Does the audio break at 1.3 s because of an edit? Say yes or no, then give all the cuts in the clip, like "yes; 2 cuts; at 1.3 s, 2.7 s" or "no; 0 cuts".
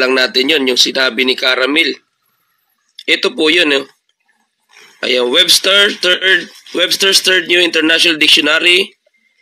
no; 1 cut; at 5.2 s